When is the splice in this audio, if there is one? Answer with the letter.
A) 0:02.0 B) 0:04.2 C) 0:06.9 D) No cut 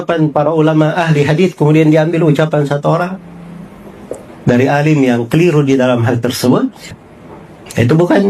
C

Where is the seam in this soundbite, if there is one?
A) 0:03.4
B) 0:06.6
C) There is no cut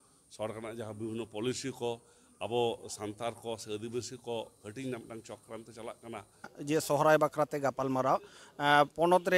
B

